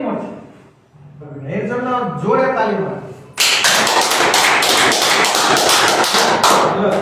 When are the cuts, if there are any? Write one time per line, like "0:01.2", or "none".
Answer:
0:01.3